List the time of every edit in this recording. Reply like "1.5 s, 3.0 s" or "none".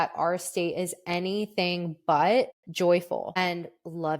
2.6 s, 3.4 s